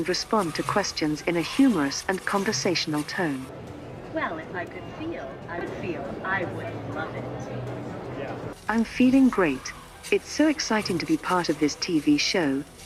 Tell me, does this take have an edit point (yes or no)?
no